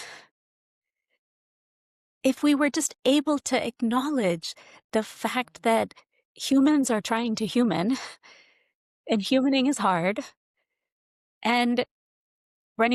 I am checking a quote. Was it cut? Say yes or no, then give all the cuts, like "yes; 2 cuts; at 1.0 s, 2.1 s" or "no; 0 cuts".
no; 0 cuts